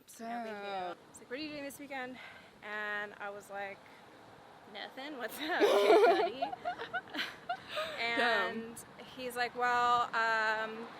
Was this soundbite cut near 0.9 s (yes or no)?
yes